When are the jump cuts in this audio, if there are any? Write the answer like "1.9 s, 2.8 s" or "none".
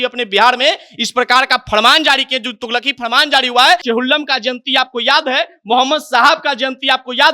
3.8 s

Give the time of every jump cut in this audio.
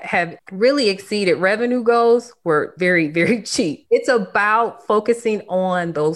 2.7 s, 3.8 s

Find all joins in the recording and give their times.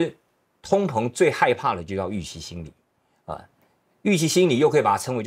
none

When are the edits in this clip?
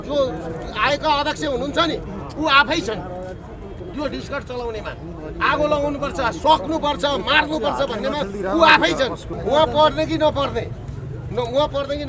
9.3 s

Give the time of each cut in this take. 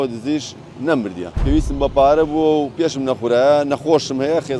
1.3 s

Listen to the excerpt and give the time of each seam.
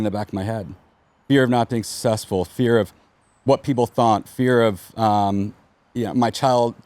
none

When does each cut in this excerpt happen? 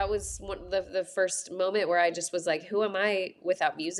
none

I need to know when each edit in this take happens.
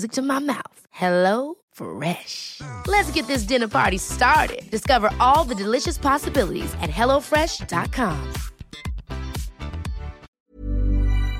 10.3 s

